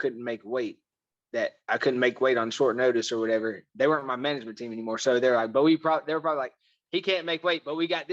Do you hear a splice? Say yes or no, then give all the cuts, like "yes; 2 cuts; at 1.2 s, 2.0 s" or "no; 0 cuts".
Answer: no; 0 cuts